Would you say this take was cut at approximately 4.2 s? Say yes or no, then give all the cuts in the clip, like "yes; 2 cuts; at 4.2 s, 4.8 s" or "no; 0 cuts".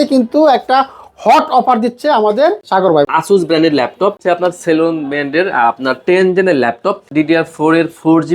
yes; 3 cuts; at 2.9 s, 4.2 s, 7.1 s